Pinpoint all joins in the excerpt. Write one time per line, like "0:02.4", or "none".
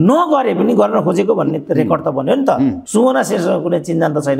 0:02.8